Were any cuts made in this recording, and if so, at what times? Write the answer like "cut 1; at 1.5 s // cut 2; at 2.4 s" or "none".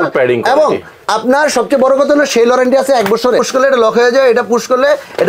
cut 1; at 3.5 s